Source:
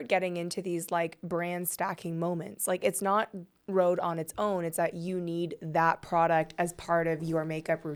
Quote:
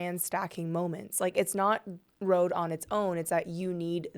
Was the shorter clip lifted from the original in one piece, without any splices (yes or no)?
yes